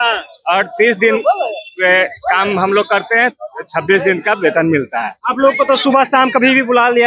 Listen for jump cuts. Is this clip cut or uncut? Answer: uncut